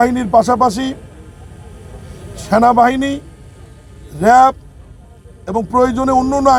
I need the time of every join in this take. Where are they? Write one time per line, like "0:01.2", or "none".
none